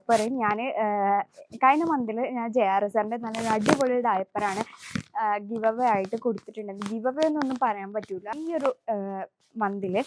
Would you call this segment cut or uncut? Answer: cut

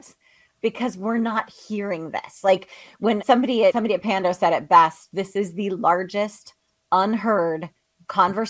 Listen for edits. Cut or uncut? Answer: uncut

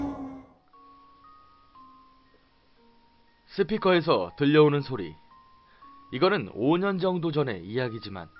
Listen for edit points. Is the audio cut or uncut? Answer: uncut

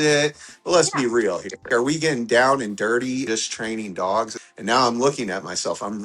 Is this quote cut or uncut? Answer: cut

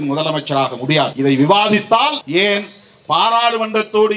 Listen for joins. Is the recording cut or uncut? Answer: cut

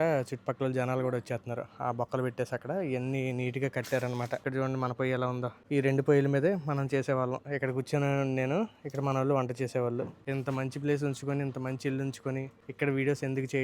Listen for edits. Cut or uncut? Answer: cut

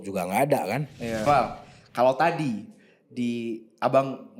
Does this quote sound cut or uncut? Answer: cut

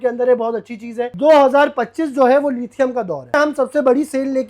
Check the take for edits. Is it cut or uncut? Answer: cut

